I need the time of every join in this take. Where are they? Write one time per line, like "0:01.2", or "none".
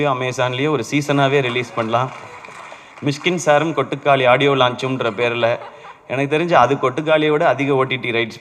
none